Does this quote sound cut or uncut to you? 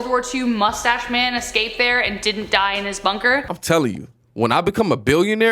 cut